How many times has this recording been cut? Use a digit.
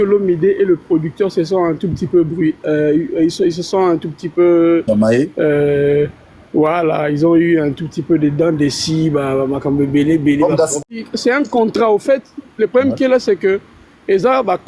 1